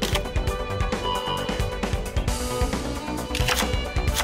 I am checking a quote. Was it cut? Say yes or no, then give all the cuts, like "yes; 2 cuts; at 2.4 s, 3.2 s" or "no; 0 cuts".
no; 0 cuts